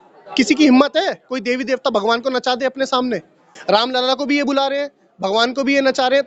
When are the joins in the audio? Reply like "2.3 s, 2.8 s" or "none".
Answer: 3.5 s